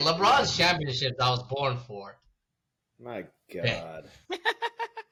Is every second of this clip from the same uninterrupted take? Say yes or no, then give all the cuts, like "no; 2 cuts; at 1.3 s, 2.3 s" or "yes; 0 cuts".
yes; 0 cuts